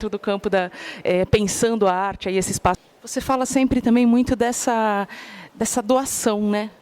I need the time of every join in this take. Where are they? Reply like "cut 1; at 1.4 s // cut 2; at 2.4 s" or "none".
cut 1; at 2.8 s